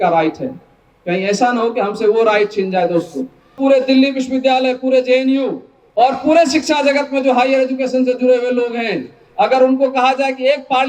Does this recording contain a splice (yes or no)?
yes